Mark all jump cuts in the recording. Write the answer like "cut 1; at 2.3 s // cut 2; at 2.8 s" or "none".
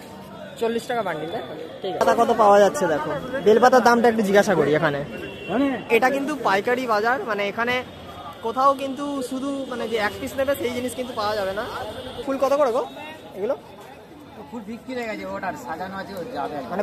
cut 1; at 2.0 s // cut 2; at 5.9 s // cut 3; at 12.2 s